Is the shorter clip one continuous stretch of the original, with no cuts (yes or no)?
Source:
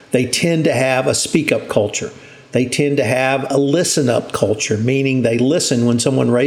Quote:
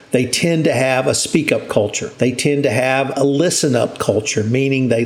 no